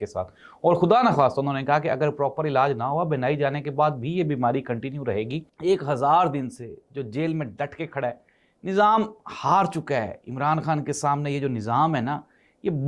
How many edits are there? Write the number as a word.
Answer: one